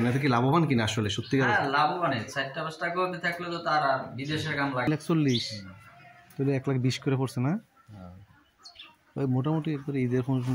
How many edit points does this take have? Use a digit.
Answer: 1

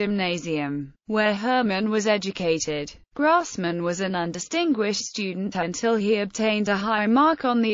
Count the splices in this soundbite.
1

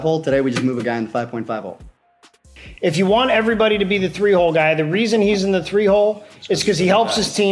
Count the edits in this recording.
1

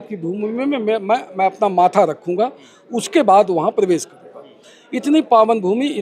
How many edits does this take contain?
0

